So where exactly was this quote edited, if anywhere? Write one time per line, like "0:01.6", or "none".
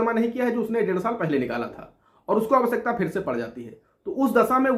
none